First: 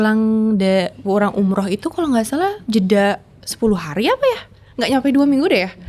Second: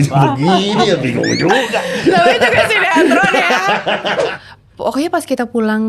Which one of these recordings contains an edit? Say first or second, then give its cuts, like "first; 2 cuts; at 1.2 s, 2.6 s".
second; 1 cut; at 4.3 s